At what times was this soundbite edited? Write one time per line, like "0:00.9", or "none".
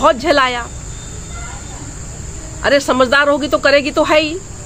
none